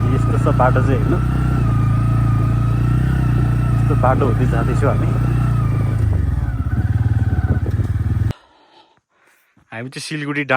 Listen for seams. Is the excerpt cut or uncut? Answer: cut